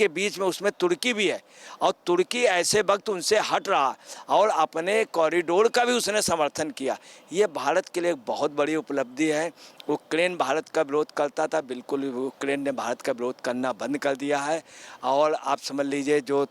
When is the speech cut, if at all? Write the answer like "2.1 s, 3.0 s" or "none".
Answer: none